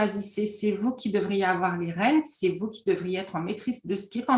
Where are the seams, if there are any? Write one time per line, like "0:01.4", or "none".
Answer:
none